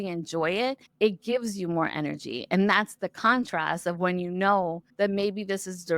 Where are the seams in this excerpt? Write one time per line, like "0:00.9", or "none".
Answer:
0:04.8